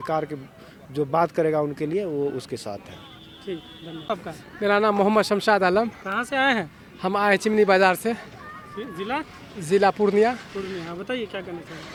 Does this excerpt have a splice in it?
no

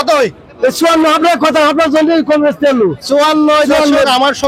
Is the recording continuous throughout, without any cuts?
yes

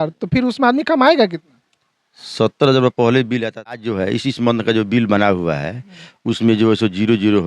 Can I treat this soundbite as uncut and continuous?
no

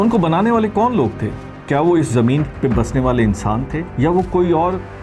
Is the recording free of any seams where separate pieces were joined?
no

